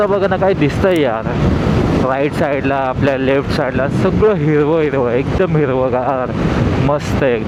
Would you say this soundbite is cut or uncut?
uncut